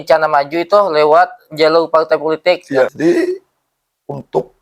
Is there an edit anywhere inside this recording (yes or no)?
yes